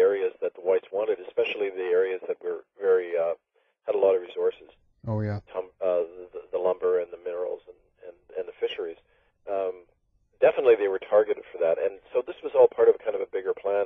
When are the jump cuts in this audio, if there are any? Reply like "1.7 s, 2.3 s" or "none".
9.4 s